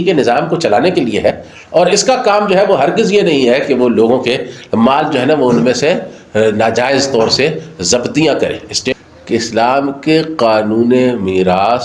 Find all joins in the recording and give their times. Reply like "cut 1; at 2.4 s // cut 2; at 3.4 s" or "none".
cut 1; at 8.8 s